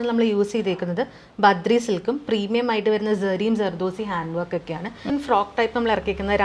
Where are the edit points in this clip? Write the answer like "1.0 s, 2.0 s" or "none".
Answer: 5.1 s